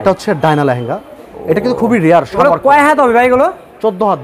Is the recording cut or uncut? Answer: cut